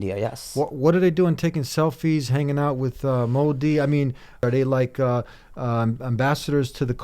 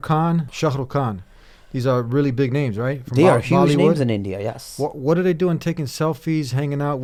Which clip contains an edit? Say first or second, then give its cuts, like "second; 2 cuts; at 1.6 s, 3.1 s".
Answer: first; 1 cut; at 4.4 s